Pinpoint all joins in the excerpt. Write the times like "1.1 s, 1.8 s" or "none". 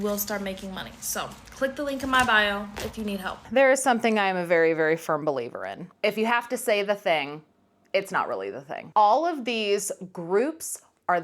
3.4 s, 8.8 s